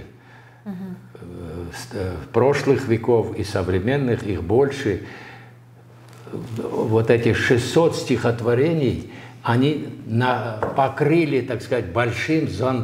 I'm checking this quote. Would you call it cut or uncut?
uncut